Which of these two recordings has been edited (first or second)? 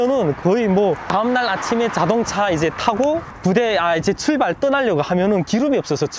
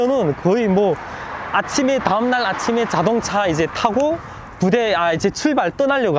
first